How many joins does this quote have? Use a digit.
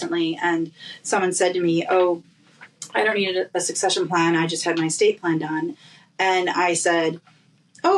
0